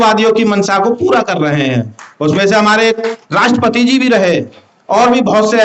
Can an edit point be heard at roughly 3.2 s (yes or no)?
yes